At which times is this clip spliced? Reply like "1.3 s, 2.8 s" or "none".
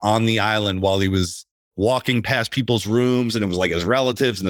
none